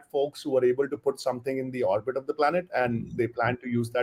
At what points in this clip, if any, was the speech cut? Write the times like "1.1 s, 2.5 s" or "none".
none